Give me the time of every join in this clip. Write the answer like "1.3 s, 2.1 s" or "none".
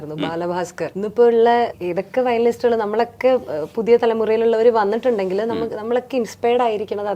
none